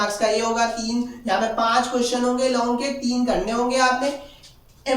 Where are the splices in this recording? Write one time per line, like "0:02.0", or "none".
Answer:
none